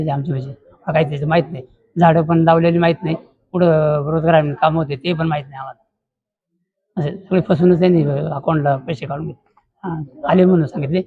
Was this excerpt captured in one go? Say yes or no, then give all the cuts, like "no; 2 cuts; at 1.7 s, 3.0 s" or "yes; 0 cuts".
yes; 0 cuts